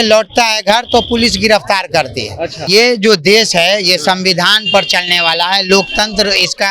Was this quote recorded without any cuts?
no; 1 cut; at 2.6 s

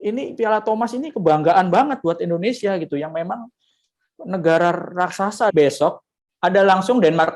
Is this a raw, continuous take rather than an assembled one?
no; 1 cut; at 5.5 s

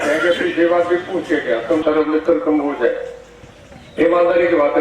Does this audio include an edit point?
yes; 1 cut; at 1.8 s

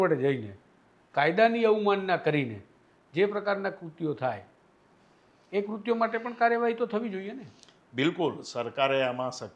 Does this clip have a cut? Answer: no; 0 cuts

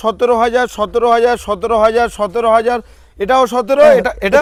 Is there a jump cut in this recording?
no; 0 cuts

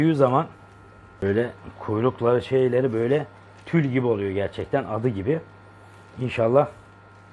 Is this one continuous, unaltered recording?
yes; 0 cuts

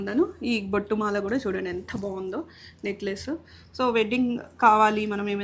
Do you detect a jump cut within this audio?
no; 0 cuts

